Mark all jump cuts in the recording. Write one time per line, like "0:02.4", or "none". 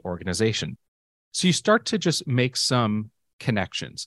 0:01.0